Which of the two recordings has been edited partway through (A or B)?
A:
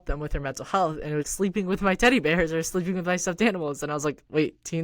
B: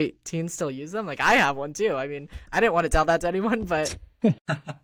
A